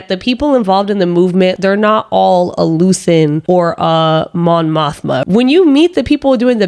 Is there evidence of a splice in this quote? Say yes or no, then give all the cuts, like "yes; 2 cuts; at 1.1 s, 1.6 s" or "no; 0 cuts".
yes; 3 cuts; at 1.6 s, 3.4 s, 5.2 s